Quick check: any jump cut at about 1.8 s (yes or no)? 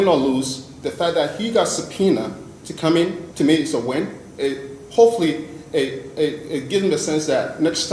no